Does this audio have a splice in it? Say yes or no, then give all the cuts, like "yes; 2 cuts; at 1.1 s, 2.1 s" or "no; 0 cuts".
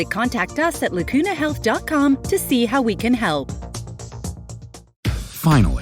yes; 1 cut; at 4.8 s